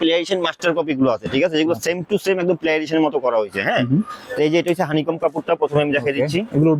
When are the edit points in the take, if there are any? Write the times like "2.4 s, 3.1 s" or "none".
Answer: none

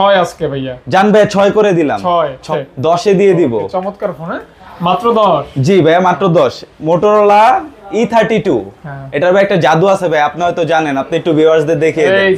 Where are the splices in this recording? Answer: 2.5 s

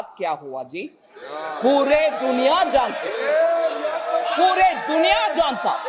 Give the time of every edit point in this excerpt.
none

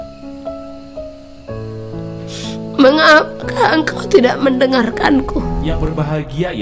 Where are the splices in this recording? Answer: 5.6 s

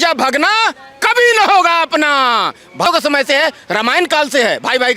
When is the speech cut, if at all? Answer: 2.9 s

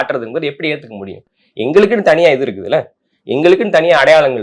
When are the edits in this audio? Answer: none

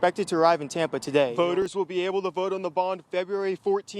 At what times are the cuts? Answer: 1.3 s

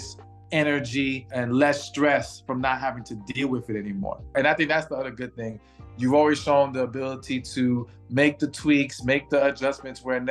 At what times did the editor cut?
1.3 s, 4.3 s

